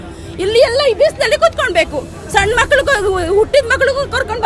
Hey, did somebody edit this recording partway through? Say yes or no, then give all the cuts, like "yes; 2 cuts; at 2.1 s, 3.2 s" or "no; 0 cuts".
no; 0 cuts